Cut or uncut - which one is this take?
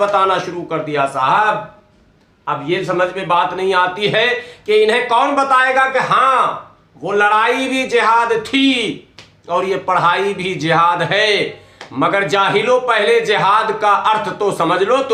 uncut